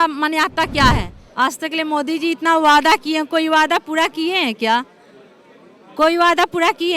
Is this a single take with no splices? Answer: no; 1 cut; at 1.2 s

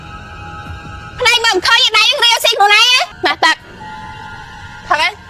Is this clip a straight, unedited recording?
no; 1 cut; at 3.1 s

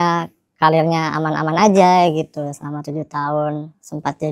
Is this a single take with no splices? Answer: yes; 0 cuts

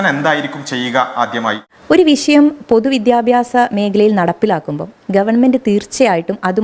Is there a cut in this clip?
yes; 1 cut; at 1.6 s

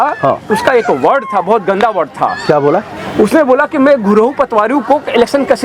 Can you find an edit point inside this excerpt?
no; 0 cuts

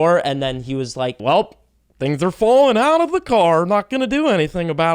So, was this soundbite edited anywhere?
yes; 1 cut; at 1.2 s

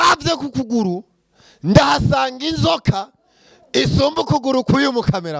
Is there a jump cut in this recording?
no; 0 cuts

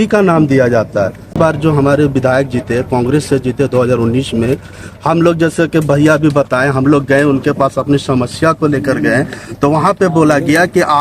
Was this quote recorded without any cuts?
no; 1 cut; at 1.4 s

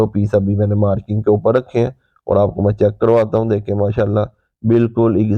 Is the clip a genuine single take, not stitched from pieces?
yes; 0 cuts

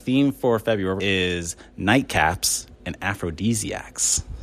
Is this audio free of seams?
no; 1 cut; at 1.0 s

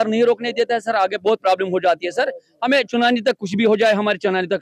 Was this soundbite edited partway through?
no; 0 cuts

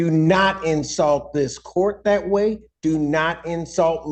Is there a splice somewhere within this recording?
no; 0 cuts

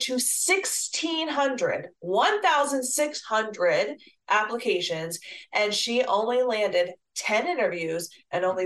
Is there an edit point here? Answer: no; 0 cuts

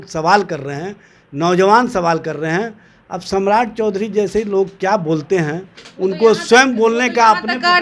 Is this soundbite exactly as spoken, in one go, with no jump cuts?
yes; 0 cuts

